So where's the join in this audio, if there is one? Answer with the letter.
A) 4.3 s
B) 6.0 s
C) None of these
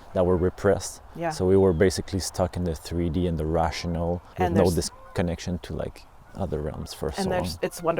A